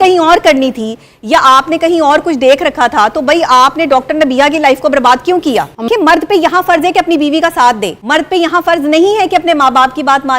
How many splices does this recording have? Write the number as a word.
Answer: two